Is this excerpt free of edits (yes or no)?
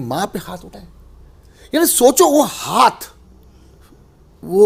yes